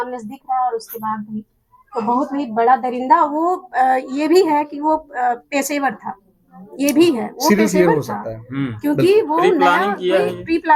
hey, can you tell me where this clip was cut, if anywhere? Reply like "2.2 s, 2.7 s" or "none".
none